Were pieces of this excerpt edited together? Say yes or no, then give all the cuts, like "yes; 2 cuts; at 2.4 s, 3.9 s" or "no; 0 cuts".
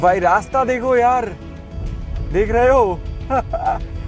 no; 0 cuts